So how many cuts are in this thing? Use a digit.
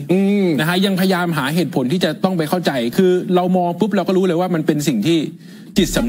0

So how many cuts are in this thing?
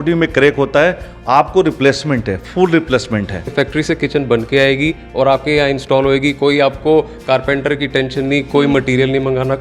1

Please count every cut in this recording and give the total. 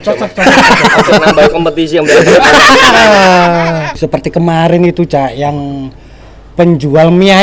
1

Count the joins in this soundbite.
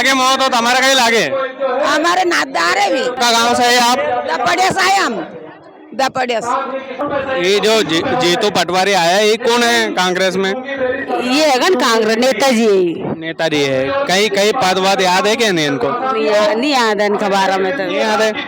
2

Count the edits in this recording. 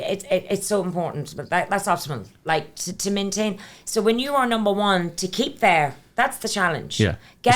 0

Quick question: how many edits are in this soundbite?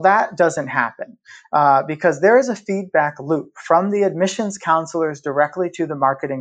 0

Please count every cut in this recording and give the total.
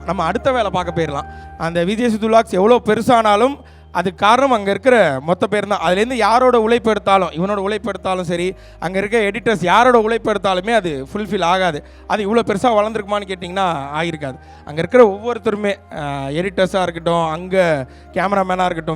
1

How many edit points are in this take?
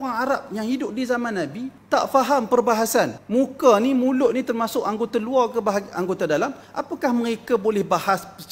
3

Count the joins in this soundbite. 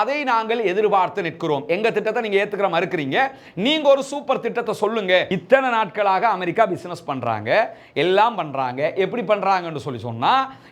1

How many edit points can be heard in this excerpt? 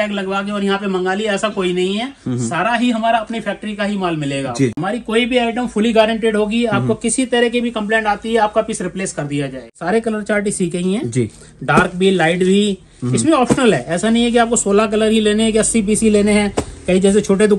2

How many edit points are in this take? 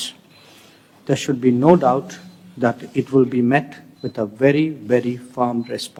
0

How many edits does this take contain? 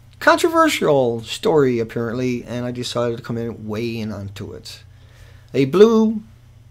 1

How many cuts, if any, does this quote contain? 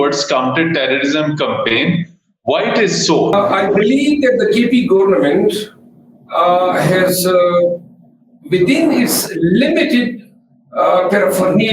1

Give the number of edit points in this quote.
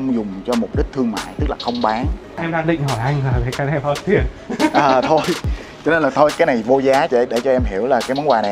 2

